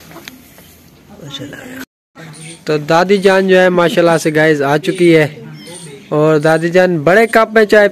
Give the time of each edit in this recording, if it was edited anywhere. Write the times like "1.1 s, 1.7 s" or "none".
2.0 s